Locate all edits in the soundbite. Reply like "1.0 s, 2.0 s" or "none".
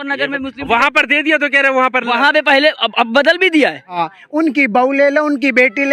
4.0 s